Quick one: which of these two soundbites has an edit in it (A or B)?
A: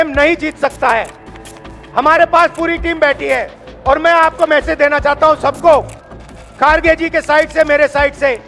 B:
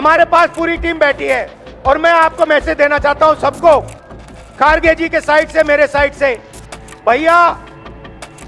B